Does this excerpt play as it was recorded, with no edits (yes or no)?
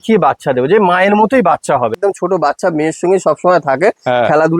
no